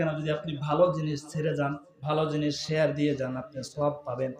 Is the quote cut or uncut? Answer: cut